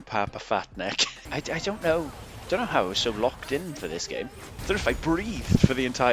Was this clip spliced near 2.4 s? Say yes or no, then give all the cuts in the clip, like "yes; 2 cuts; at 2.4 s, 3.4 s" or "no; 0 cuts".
no; 2 cuts; at 1.1 s, 4.5 s